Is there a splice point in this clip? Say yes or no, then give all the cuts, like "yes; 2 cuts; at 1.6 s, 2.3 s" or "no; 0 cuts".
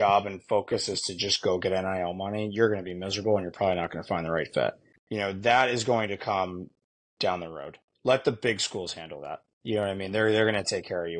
yes; 1 cut; at 4.9 s